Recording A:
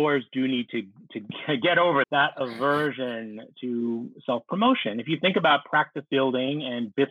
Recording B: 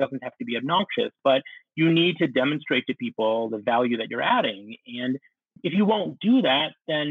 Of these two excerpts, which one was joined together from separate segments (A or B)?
A